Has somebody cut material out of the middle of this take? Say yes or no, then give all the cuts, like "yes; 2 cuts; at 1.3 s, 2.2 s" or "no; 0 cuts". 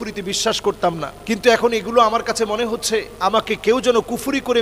yes; 2 cuts; at 1.1 s, 3.1 s